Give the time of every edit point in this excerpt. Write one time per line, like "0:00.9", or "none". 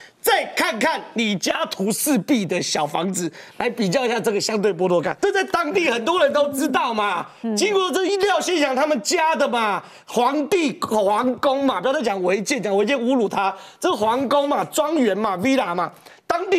0:05.1